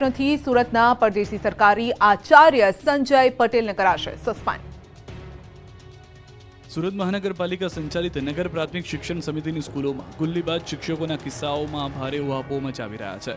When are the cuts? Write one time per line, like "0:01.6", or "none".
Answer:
none